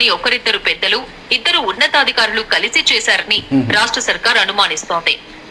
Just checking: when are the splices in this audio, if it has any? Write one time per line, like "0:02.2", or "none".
none